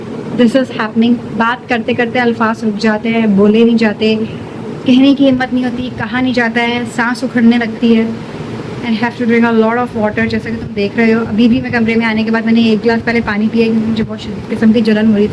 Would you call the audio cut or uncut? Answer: uncut